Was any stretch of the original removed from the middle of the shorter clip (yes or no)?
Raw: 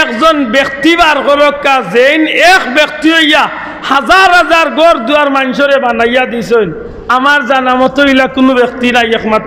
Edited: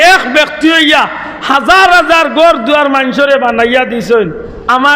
no